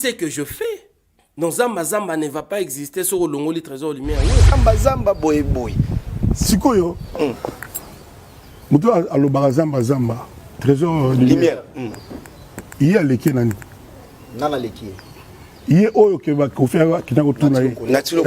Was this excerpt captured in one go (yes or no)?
no